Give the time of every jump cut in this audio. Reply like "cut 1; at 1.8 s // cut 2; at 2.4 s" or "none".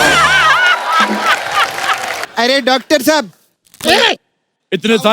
cut 1; at 2.2 s